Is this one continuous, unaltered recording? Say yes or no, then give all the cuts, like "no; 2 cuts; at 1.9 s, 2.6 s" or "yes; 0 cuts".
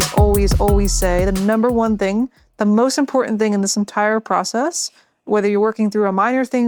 yes; 0 cuts